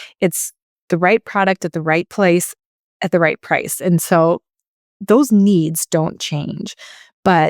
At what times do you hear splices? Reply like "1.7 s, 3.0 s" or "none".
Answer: 2.1 s

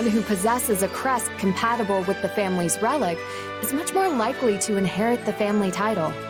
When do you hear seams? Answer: none

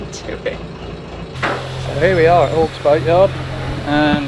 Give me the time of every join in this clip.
1.4 s

